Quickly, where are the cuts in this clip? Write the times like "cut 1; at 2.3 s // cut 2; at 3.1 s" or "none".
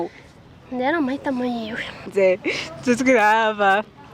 cut 1; at 2.1 s